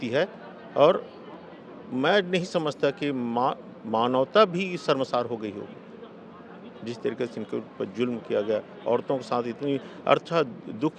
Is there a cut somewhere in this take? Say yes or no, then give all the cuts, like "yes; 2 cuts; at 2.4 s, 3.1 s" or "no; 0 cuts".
no; 0 cuts